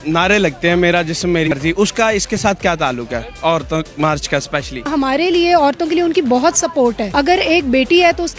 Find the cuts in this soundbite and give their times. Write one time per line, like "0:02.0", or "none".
0:01.5
0:04.8
0:07.0